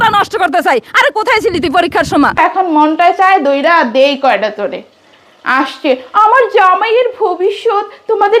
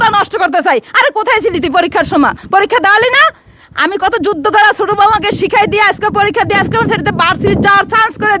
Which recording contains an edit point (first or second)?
first